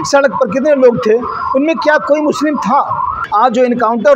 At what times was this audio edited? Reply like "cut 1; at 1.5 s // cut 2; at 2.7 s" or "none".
cut 1; at 3.2 s